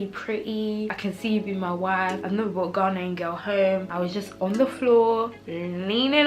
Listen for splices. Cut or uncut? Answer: cut